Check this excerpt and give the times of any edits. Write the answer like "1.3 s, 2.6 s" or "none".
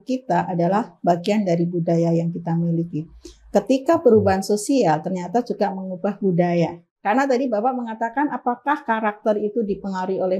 6.9 s